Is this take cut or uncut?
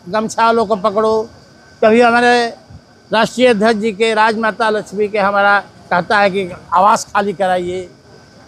uncut